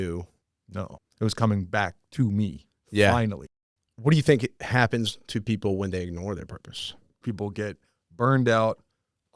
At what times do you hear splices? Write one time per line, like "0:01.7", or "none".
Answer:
0:00.8
0:03.4
0:04.6
0:07.2